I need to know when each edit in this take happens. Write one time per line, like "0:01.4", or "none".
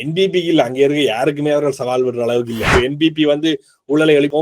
0:02.7